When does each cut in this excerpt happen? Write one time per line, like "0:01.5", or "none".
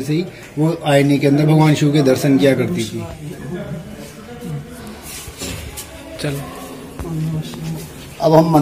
none